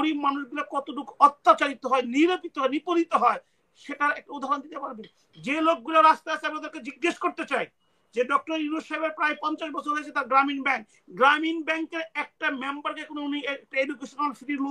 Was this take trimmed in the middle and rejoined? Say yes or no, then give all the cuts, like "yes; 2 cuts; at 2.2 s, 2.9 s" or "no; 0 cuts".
no; 0 cuts